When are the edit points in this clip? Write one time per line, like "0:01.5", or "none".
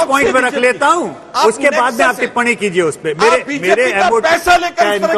none